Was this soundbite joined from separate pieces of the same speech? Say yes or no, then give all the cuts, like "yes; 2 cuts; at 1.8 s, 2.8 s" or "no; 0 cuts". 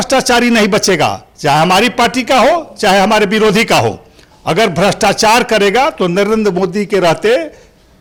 no; 0 cuts